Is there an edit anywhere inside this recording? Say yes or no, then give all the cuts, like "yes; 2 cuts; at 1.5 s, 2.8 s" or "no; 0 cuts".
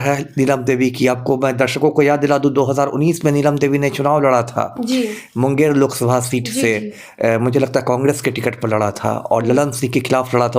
no; 0 cuts